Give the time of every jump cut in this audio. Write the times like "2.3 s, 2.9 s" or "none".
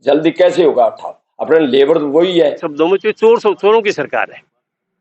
2.7 s